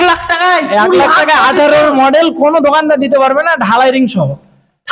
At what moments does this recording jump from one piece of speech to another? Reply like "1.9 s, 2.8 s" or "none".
none